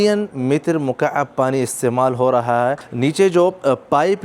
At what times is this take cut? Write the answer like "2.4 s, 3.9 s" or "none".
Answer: 2.9 s